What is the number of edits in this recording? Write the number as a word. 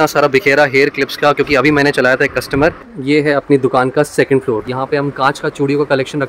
two